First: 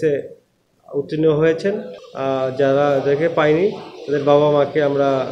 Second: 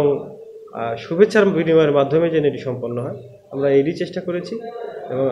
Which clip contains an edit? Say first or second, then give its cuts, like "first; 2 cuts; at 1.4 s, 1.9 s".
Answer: first; 1 cut; at 1.9 s